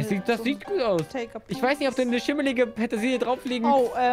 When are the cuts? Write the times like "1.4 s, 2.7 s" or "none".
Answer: none